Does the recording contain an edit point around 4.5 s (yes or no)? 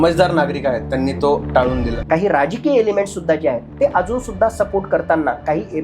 no